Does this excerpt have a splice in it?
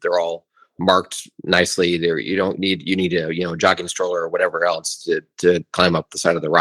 no; 0 cuts

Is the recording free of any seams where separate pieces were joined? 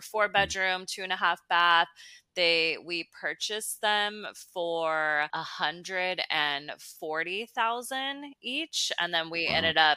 yes; 0 cuts

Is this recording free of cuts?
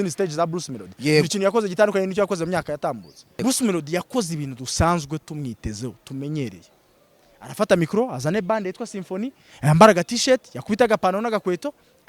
no; 1 cut; at 3.4 s

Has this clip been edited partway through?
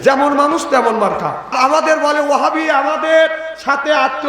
yes; 1 cut; at 1.5 s

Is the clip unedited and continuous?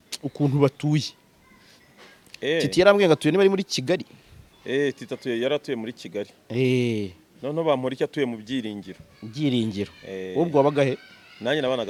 yes; 0 cuts

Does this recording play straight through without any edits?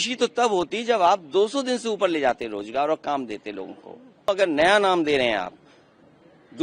no; 1 cut; at 4.3 s

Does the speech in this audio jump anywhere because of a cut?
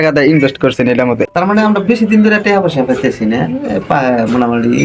yes; 1 cut; at 1.3 s

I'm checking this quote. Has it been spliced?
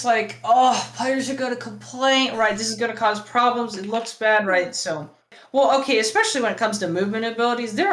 yes; 1 cut; at 5.3 s

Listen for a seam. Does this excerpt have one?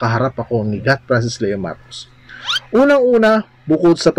no; 0 cuts

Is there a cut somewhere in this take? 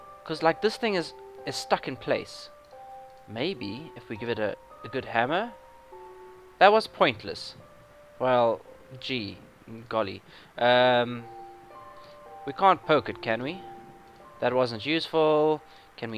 yes; 1 cut; at 6.9 s

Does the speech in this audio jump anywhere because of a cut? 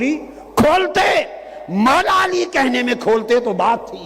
no; 0 cuts

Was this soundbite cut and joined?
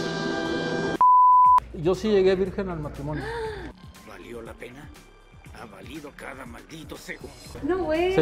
yes; 1 cut; at 1.7 s

